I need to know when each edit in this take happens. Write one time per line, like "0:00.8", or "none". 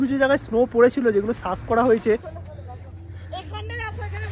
0:02.4